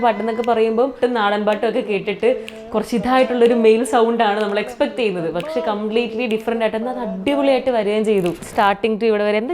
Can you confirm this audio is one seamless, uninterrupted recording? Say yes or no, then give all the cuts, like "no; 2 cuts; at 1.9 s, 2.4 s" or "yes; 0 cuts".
no; 2 cuts; at 1.0 s, 8.5 s